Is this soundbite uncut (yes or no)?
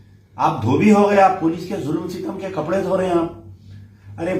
yes